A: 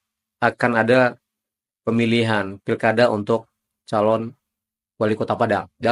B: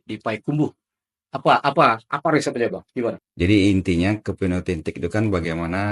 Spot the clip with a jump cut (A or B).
B